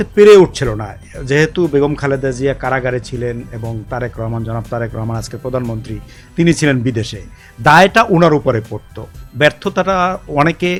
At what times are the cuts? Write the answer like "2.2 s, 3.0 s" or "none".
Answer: none